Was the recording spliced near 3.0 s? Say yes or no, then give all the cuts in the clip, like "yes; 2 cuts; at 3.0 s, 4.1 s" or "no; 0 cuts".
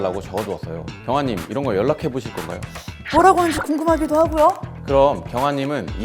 yes; 1 cut; at 3.0 s